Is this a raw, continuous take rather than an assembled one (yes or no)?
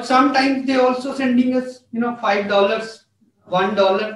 yes